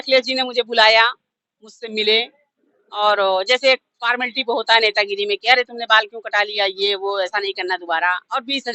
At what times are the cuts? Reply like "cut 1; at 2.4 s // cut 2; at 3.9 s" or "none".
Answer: none